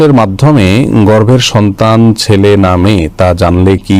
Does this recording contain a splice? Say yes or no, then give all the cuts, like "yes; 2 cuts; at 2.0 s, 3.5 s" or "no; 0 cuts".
no; 0 cuts